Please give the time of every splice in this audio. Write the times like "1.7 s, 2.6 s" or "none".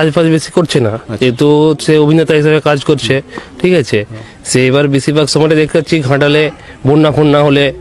none